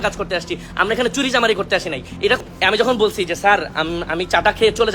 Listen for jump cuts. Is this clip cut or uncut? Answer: cut